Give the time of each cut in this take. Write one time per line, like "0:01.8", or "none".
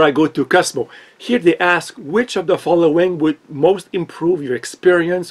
none